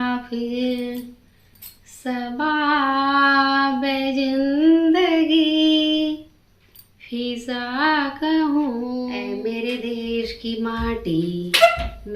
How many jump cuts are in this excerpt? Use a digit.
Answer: 1